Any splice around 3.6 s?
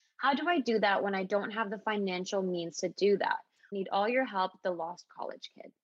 yes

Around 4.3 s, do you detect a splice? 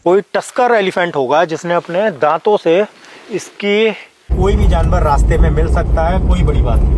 yes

